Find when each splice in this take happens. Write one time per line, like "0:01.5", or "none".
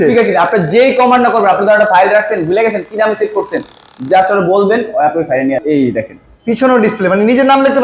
0:05.6